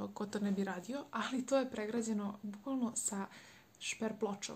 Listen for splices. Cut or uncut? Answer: uncut